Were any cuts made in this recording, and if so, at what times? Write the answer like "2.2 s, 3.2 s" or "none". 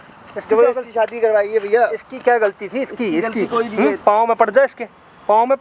none